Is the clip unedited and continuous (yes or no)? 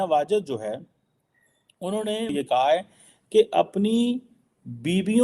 no